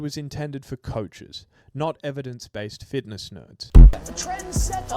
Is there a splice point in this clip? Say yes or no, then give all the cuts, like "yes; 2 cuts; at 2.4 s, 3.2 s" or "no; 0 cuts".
yes; 1 cut; at 4.0 s